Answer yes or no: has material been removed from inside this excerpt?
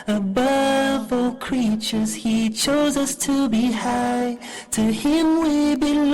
yes